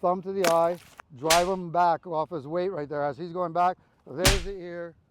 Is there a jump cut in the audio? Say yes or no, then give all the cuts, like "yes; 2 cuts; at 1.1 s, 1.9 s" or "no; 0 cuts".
no; 0 cuts